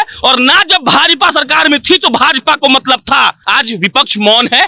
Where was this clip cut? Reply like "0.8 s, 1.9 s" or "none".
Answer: 3.4 s